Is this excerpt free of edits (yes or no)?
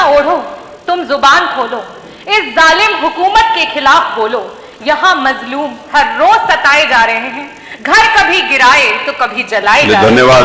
yes